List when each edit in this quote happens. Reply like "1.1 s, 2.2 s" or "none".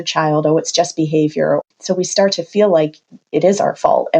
1.6 s